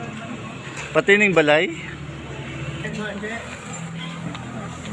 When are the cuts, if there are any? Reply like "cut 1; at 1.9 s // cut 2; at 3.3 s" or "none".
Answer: cut 1; at 2.8 s